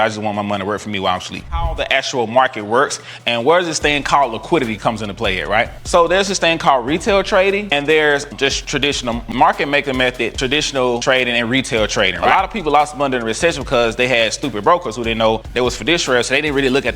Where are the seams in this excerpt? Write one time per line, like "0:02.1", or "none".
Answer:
0:01.6
0:12.2